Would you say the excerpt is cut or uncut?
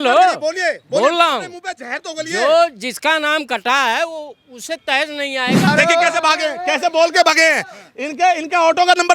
cut